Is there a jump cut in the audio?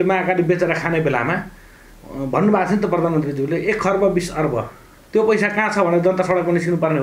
no; 0 cuts

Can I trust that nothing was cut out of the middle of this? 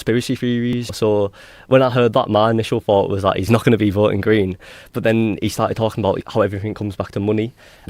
no; 1 cut; at 0.9 s

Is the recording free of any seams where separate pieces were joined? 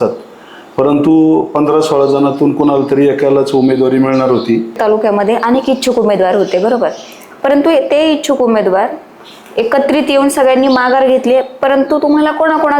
no; 1 cut; at 4.8 s

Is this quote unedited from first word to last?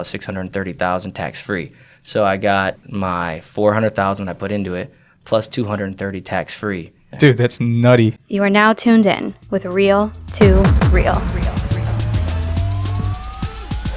no; 3 cuts; at 2.8 s, 7.0 s, 8.2 s

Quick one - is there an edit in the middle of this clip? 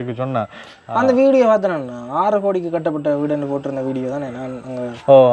no; 0 cuts

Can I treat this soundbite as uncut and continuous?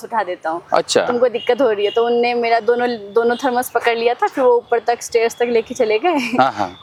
yes; 0 cuts

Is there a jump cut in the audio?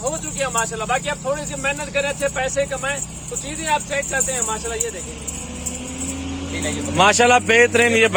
no; 0 cuts

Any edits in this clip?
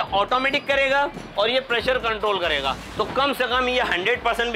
yes; 1 cut; at 2.8 s

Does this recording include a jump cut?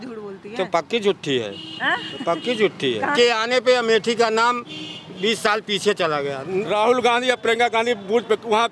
yes; 2 cuts; at 3.1 s, 6.7 s

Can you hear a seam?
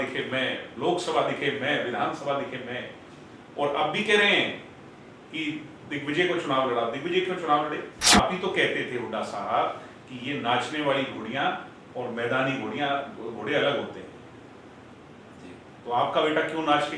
yes; 1 cut; at 7.9 s

